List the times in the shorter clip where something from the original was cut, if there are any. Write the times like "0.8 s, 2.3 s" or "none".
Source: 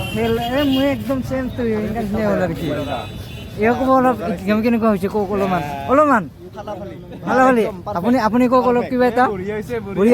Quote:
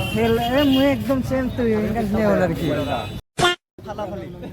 3.6 s